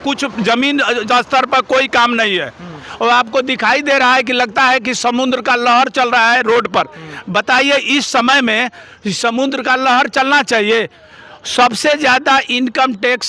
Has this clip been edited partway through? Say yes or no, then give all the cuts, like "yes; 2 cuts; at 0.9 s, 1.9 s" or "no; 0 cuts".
no; 0 cuts